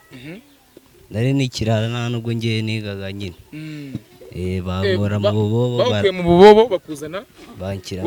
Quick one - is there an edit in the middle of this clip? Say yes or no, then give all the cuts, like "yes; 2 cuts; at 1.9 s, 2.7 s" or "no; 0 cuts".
no; 0 cuts